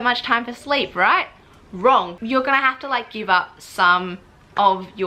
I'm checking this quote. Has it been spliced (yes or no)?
yes